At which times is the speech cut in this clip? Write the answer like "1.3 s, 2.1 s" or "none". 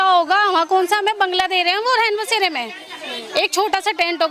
none